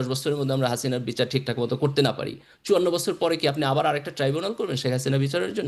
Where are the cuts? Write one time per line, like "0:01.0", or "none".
none